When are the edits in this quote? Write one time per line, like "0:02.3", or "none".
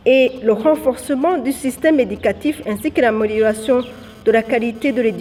none